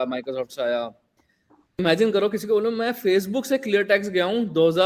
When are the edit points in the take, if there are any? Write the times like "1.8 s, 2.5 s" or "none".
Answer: 1.8 s